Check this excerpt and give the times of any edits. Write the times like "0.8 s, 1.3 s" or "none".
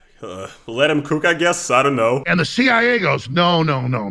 2.2 s